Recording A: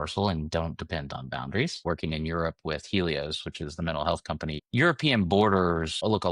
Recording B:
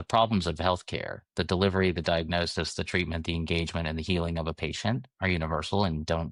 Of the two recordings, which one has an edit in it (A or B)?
A